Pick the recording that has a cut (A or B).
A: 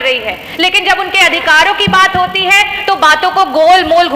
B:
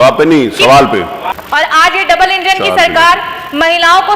B